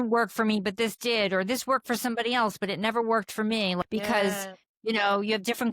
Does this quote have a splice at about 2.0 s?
no; 1 cut; at 3.8 s

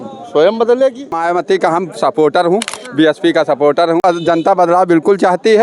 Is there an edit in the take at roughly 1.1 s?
yes; 2 cuts; at 1.1 s, 4.0 s

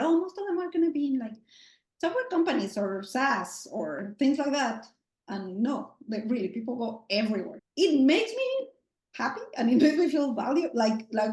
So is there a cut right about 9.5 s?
no; 1 cut; at 7.6 s

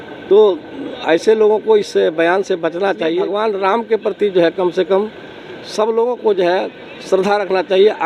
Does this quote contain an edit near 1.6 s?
no; 1 cut; at 3.3 s

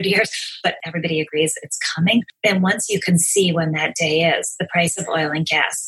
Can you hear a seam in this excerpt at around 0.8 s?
yes; 2 cuts; at 0.8 s, 2.3 s

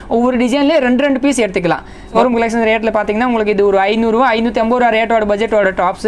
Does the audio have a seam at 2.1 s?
yes; 1 cut; at 2.1 s

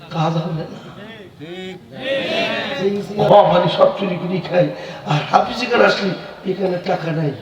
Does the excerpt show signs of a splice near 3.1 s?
yes; 1 cut; at 3.1 s

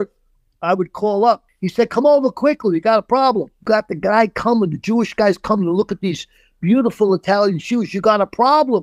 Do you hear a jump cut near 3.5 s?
yes; 2 cuts; at 1.6 s, 3.5 s

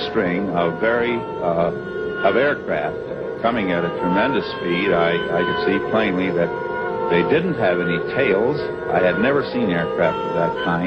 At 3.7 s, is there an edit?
no; 0 cuts

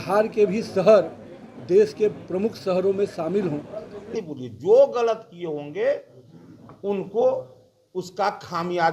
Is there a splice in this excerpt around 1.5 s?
no; 1 cut; at 4.1 s

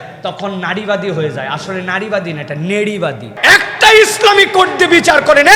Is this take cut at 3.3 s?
yes; 1 cut; at 3.3 s

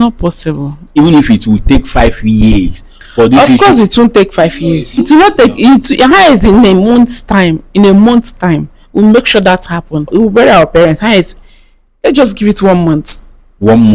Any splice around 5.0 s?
yes; 3 cuts; at 0.9 s, 5.0 s, 10.1 s

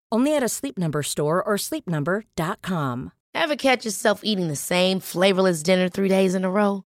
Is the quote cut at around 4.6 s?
no; 1 cut; at 3.2 s

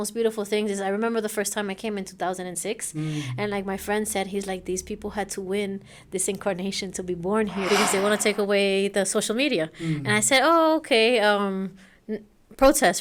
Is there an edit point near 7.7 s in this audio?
yes; 1 cut; at 7.7 s

